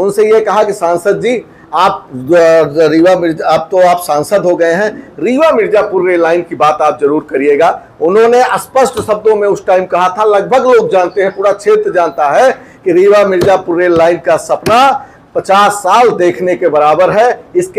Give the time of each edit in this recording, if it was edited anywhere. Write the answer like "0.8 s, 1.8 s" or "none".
none